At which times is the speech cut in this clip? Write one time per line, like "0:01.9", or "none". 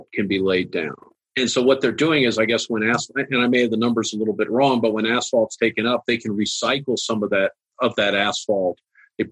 0:01.0